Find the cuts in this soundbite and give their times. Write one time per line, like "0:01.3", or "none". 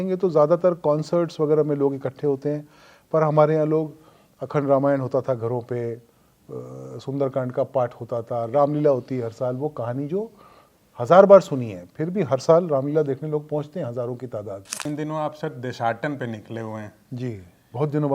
0:14.9